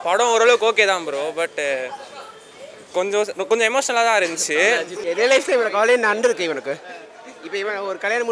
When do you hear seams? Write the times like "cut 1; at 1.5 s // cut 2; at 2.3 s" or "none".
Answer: cut 1; at 4.9 s